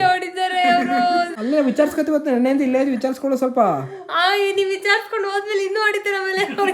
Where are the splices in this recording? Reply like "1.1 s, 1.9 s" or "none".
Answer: 1.3 s